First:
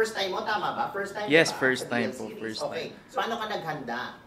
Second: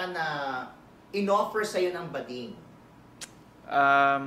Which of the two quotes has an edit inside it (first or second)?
first